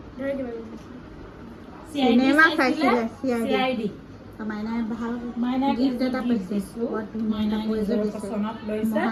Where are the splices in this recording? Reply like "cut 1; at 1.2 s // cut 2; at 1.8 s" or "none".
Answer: none